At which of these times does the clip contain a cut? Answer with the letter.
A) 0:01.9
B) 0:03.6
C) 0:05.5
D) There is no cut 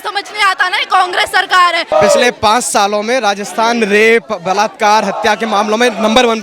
A